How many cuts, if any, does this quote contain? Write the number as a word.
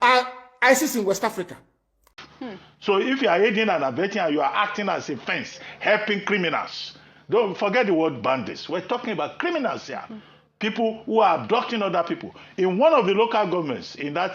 one